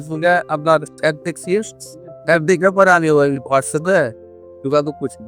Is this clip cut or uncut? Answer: uncut